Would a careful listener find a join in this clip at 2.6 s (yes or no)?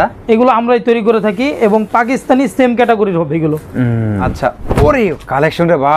no